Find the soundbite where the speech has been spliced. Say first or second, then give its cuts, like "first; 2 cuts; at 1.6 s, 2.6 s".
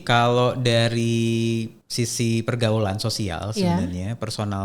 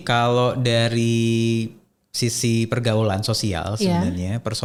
first; 1 cut; at 1.8 s